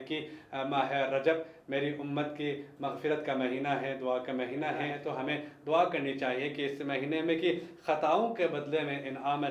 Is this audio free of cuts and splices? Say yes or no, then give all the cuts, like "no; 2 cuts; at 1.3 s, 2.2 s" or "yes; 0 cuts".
yes; 0 cuts